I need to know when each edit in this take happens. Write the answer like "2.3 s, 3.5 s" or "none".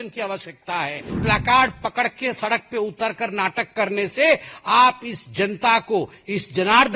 1.2 s